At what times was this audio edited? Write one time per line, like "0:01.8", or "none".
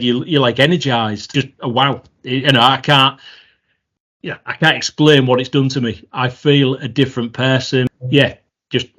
0:01.2
0:08.0